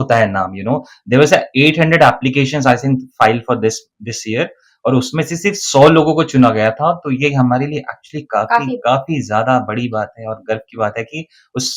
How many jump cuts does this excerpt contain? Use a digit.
0